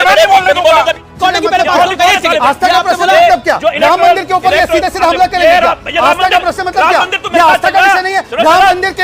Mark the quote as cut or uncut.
cut